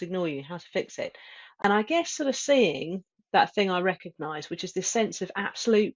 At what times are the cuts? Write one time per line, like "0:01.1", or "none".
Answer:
0:01.6